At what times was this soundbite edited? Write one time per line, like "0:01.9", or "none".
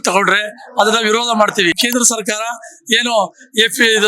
0:01.8